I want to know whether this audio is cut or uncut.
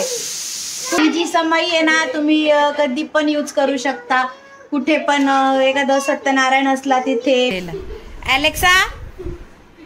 cut